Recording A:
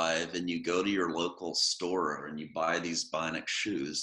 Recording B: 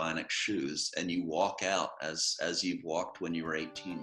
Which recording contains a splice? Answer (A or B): A